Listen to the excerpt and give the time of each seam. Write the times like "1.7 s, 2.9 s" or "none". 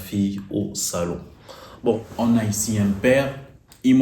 2.1 s